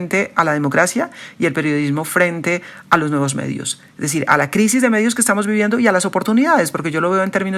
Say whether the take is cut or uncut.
uncut